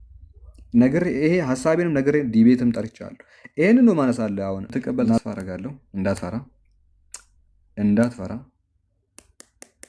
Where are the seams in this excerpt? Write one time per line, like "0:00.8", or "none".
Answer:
0:05.2